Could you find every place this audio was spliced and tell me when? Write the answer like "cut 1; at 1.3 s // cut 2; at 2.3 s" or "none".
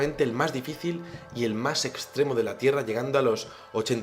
cut 1; at 1.5 s